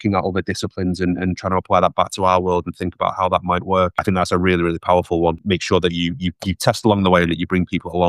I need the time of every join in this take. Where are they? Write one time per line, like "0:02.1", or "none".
0:04.0
0:05.4